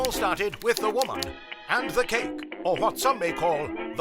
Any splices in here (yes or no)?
no